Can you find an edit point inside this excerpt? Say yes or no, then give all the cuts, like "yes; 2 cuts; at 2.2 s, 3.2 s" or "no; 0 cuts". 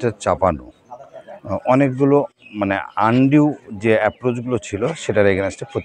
no; 0 cuts